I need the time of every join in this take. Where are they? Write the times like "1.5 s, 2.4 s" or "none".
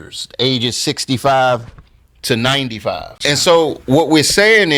3.1 s

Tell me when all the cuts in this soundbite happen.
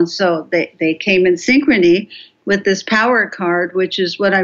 none

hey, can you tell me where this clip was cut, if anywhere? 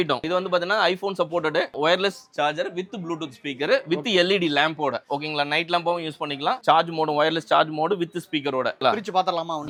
none

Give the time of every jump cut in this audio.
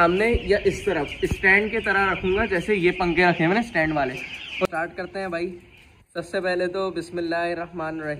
4.6 s

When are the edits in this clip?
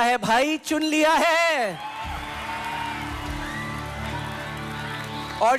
none

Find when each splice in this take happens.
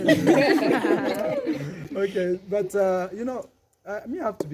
none

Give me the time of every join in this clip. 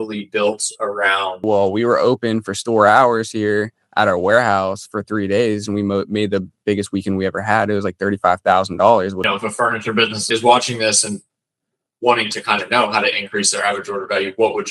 1.4 s, 9.2 s, 10.2 s

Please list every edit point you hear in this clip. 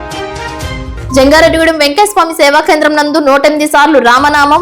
0.9 s

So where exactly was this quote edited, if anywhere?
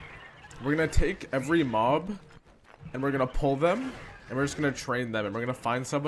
none

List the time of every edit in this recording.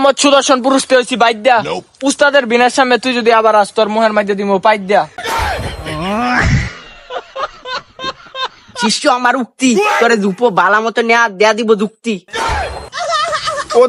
none

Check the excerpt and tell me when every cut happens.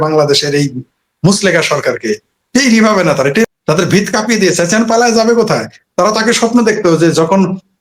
3.5 s

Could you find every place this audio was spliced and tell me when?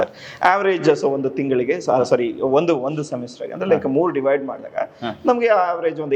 none

